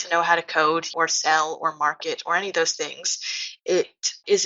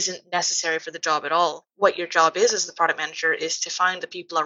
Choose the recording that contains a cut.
first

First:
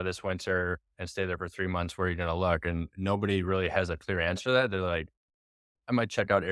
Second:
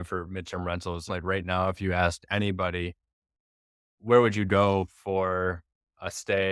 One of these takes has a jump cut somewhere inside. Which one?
second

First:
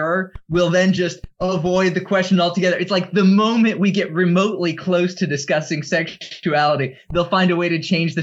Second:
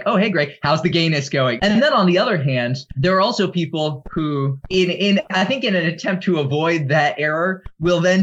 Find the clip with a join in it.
second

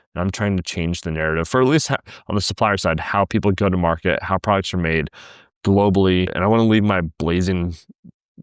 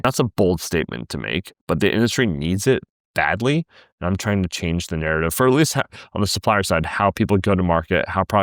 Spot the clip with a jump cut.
first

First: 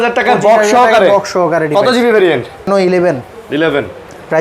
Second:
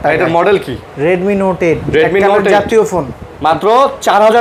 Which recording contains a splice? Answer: first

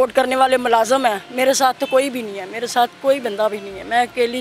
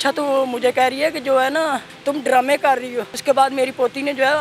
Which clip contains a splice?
second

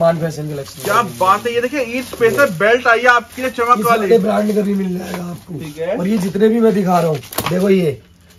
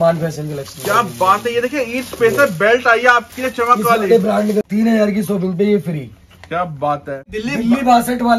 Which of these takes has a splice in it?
second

